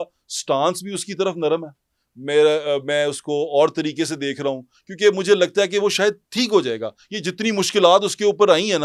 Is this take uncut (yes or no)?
yes